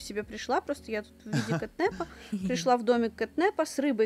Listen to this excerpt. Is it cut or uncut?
uncut